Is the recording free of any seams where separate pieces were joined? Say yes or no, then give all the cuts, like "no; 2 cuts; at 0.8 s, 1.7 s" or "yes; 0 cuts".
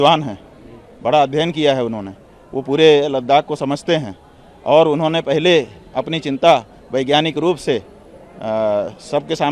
yes; 0 cuts